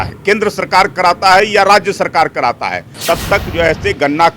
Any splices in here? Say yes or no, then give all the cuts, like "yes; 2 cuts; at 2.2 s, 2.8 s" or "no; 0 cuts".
yes; 1 cut; at 2.9 s